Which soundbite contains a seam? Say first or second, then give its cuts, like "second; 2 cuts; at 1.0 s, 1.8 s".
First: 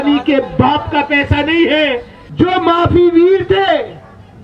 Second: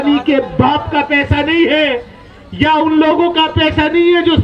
first; 1 cut; at 2.2 s